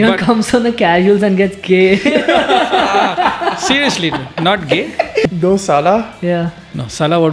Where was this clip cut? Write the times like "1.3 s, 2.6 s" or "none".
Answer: 5.2 s